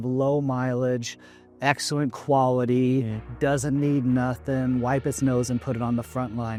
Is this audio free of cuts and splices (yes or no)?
yes